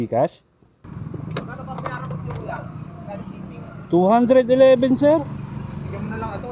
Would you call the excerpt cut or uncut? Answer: cut